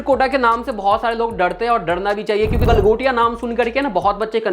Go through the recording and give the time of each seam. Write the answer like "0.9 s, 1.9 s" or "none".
2.6 s